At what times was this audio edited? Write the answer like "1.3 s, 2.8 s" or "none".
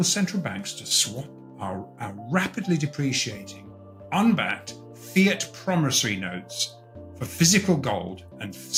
none